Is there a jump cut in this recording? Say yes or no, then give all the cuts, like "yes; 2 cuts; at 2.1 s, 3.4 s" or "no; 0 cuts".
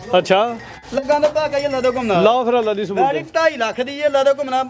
no; 0 cuts